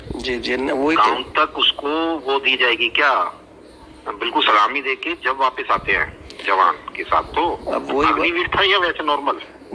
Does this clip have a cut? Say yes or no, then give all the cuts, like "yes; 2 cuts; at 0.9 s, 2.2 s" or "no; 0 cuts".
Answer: no; 0 cuts